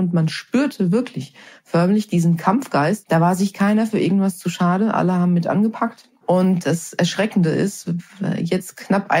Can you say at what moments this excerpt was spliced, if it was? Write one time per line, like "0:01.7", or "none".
0:03.0
0:06.6